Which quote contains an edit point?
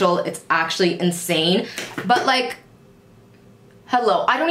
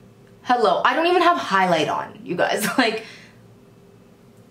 first; 1 cut; at 1.8 s

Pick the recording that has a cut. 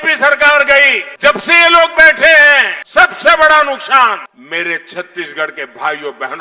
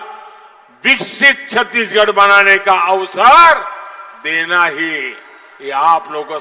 first; 3 cuts; at 1.0 s, 2.8 s, 4.3 s

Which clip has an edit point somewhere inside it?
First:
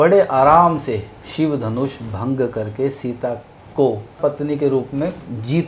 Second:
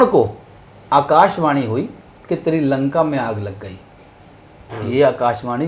first; 1 cut; at 4.2 s

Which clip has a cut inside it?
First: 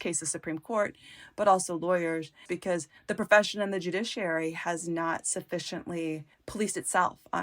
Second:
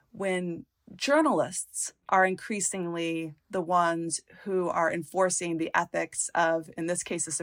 first; 2 cuts; at 2.5 s, 6.4 s

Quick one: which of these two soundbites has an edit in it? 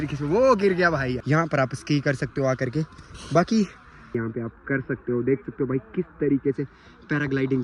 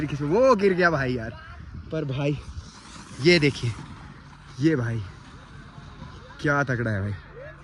first; 2 cuts; at 1.2 s, 4.1 s

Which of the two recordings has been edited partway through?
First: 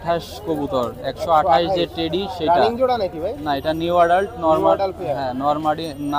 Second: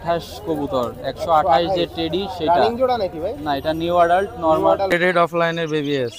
second; 1 cut; at 5.3 s

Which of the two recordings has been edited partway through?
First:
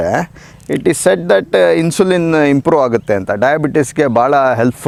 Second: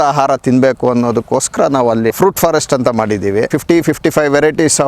second; 2 cuts; at 2.1 s, 3.6 s

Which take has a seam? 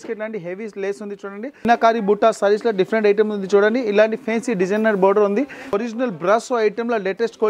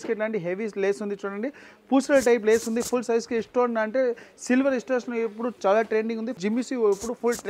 first; 2 cuts; at 1.6 s, 5.6 s

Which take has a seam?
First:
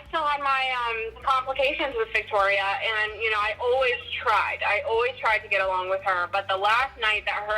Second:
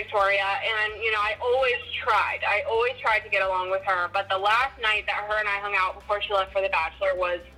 first; 1 cut; at 1.1 s

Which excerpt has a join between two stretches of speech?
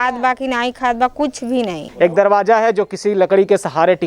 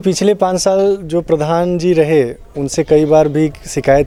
first; 1 cut; at 1.8 s

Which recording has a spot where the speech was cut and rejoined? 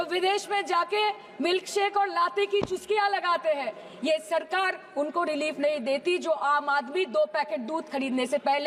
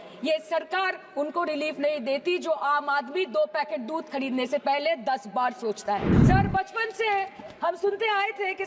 second; 1 cut; at 6.1 s

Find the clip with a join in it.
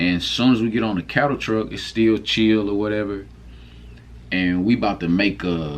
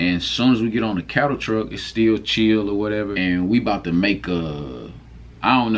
second; 1 cut; at 3.1 s

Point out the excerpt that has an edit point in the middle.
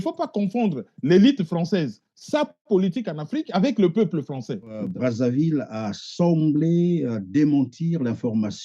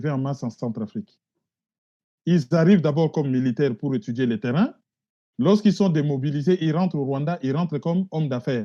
first; 1 cut; at 4.8 s

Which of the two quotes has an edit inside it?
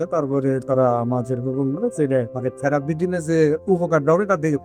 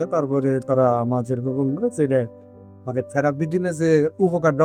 first; 1 cut; at 2.3 s

